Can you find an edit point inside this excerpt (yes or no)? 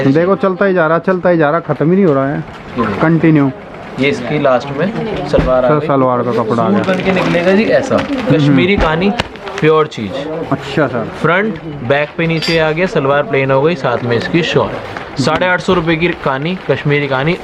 no